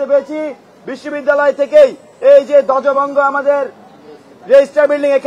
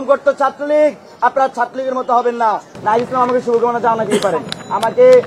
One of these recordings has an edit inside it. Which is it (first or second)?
second